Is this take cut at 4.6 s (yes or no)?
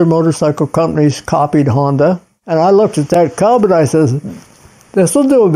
no